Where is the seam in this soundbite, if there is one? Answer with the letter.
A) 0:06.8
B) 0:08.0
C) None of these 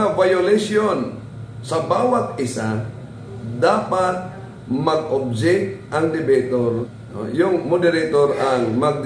A